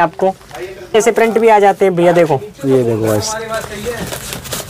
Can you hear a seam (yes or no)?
yes